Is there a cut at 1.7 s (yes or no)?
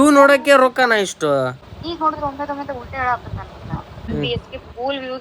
yes